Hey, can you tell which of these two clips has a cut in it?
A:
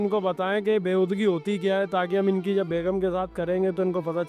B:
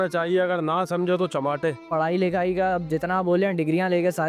B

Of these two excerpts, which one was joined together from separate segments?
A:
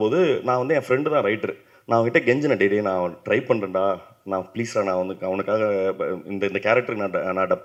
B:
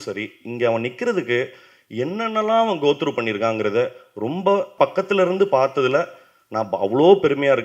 B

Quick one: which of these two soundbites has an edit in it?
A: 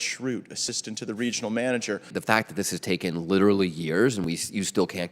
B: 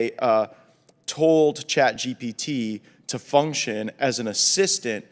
A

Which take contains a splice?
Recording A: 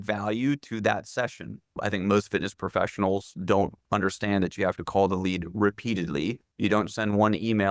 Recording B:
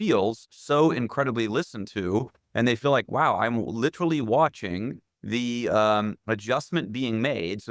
A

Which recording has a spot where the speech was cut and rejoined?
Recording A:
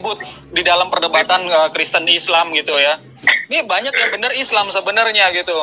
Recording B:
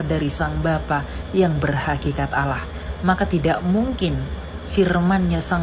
B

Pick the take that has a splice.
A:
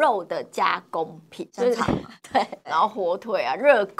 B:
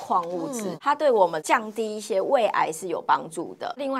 A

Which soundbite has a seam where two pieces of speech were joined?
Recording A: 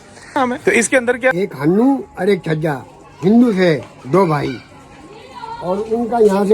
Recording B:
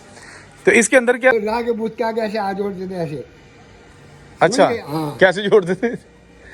A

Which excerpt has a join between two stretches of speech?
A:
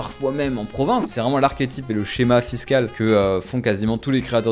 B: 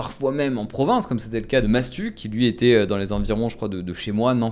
A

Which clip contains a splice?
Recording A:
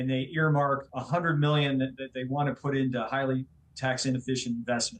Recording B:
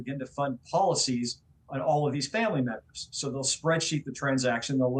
A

